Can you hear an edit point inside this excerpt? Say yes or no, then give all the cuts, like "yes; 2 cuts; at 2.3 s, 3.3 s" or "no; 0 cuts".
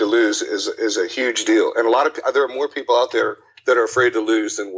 no; 0 cuts